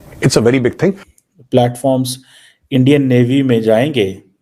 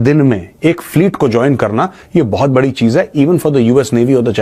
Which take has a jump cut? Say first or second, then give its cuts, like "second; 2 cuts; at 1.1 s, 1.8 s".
first; 1 cut; at 1.1 s